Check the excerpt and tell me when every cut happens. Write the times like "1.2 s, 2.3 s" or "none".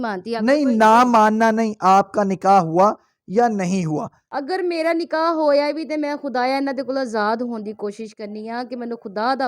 4.2 s

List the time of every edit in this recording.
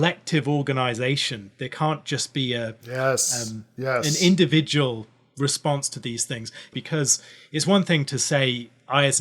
6.7 s

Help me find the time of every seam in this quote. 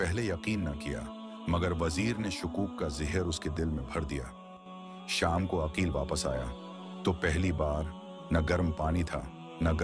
4.6 s

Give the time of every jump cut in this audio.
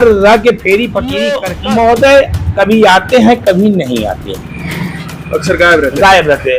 1.5 s

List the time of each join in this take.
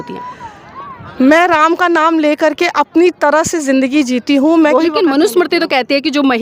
4.7 s

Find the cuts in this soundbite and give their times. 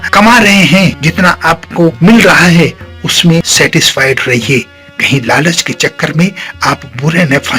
1.0 s, 3.5 s

